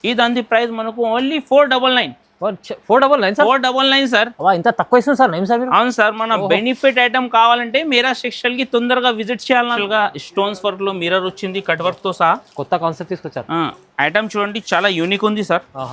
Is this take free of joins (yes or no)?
no